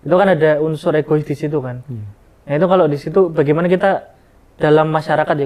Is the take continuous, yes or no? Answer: yes